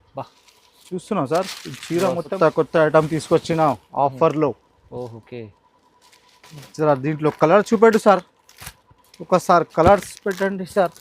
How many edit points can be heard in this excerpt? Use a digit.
2